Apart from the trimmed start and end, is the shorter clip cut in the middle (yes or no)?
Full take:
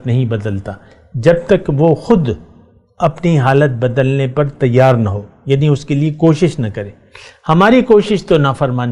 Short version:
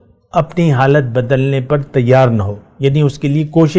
no